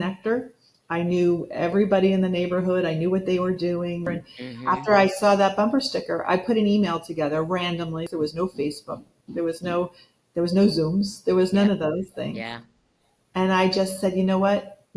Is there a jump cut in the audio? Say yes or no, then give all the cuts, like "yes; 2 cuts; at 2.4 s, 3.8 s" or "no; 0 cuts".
yes; 2 cuts; at 4.1 s, 8.1 s